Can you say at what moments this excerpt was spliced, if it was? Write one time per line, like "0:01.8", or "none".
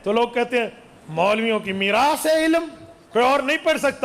0:03.0